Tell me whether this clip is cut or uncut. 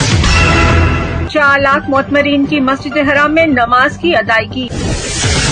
cut